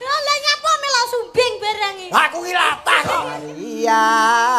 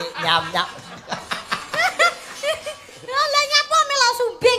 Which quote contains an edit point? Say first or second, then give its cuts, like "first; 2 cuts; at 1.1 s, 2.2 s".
first; 1 cut; at 3.5 s